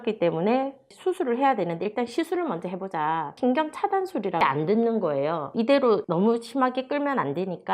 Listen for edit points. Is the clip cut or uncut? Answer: cut